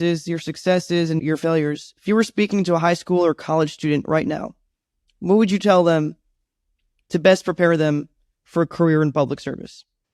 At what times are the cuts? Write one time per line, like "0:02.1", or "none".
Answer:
0:01.2